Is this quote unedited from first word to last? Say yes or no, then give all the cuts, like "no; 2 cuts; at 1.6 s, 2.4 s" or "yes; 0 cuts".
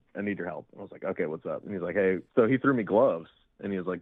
no; 1 cut; at 2.2 s